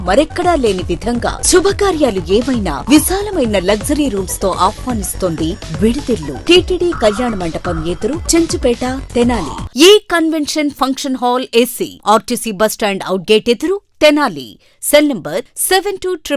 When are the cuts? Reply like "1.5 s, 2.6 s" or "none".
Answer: 6.3 s, 9.6 s